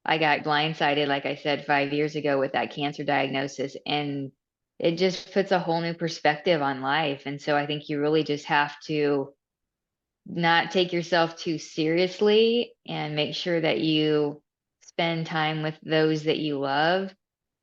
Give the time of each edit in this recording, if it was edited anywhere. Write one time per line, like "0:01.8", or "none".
none